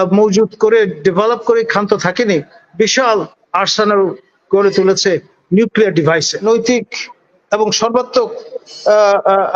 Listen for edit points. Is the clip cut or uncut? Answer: cut